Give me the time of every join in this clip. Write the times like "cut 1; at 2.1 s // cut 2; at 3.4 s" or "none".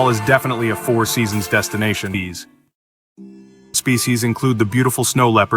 cut 1; at 2.1 s // cut 2; at 3.8 s